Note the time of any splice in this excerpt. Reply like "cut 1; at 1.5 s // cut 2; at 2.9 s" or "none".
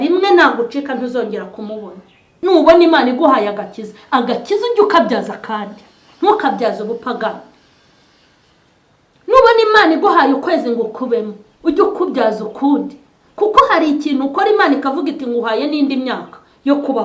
cut 1; at 2.3 s